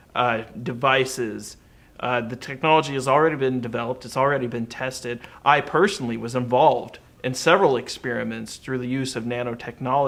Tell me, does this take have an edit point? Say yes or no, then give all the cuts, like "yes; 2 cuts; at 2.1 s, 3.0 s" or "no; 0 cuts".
no; 0 cuts